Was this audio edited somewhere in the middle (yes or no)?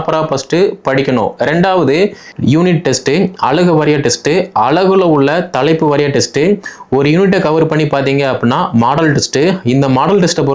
yes